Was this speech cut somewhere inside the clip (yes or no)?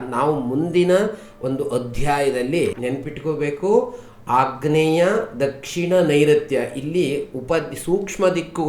yes